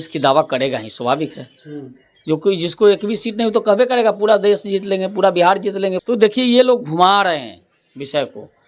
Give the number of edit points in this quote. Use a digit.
1